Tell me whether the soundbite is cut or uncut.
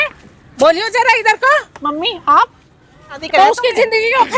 cut